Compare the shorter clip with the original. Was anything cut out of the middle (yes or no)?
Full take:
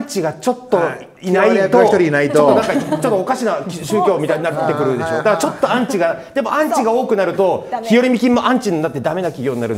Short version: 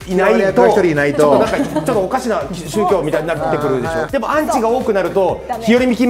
yes